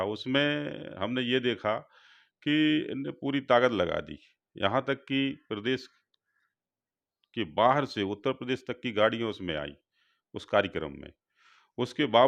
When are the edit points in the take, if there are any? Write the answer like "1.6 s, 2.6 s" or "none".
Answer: none